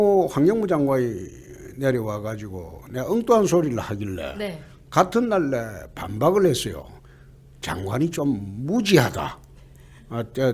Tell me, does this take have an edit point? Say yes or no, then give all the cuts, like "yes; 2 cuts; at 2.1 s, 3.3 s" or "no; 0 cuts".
no; 0 cuts